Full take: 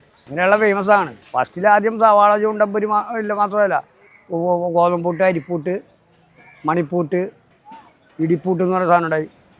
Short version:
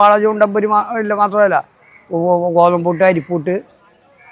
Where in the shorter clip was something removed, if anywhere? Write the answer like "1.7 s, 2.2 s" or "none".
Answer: none